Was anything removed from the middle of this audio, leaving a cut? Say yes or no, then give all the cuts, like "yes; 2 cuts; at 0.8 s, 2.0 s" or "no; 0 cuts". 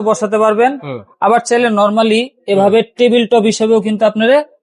no; 0 cuts